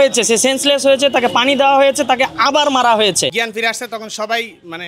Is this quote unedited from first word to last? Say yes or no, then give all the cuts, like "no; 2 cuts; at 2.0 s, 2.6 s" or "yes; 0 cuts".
no; 1 cut; at 3.4 s